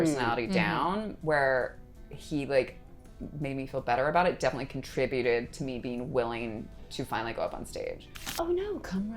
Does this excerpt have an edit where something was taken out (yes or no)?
yes